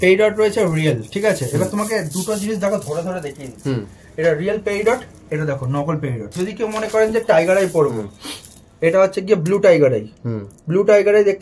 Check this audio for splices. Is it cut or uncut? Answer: cut